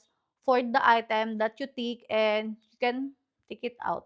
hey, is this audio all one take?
yes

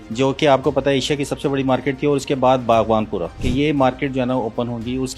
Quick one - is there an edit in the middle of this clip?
yes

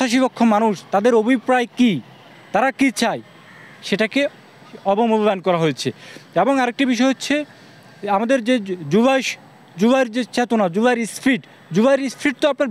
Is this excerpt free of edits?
yes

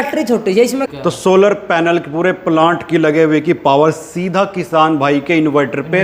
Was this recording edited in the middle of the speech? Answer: yes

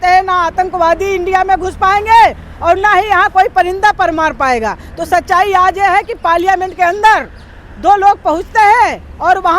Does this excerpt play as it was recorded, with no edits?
yes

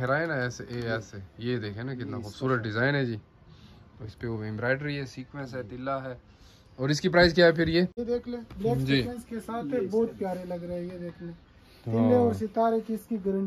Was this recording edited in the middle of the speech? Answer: yes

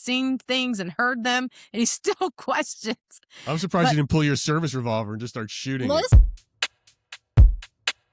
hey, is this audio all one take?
no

